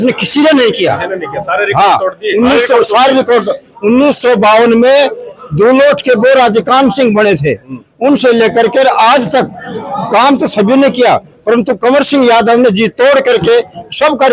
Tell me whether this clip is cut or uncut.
uncut